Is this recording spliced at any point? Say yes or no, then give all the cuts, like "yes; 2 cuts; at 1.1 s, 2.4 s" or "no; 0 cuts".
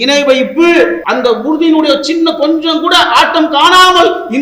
yes; 1 cut; at 1.0 s